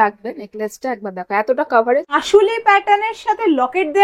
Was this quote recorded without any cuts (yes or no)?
no